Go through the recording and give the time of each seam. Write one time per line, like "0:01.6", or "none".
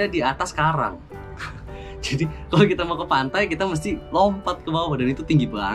none